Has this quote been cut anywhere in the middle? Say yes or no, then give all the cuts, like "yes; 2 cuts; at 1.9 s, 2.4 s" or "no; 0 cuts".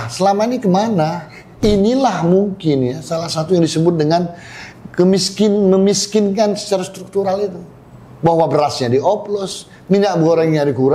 yes; 1 cut; at 1.6 s